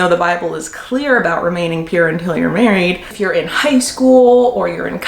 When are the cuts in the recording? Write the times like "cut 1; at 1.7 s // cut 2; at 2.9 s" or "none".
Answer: cut 1; at 3.1 s